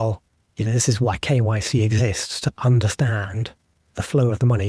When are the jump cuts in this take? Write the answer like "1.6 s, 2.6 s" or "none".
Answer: none